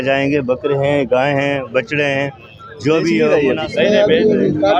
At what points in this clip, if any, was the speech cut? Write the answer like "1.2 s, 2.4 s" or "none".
3.3 s